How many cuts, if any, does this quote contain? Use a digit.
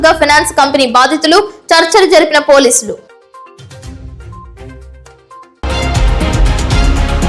1